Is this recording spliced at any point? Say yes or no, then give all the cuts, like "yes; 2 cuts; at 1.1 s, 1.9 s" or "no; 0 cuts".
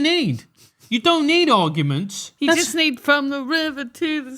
yes; 1 cut; at 2.2 s